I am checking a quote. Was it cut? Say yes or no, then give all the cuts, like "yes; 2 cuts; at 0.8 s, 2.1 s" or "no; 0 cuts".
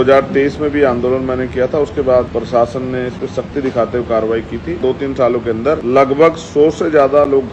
yes; 3 cuts; at 2.3 s, 4.8 s, 5.8 s